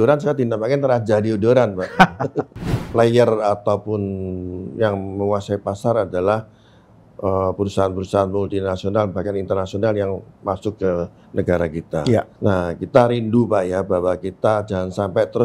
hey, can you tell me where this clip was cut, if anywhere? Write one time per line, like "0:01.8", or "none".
0:02.8
0:12.3